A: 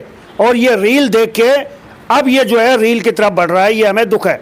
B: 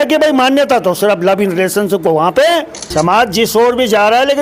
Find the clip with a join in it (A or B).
B